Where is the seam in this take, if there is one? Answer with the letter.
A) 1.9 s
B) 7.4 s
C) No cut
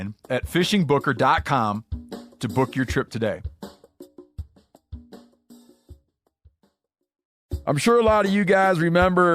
B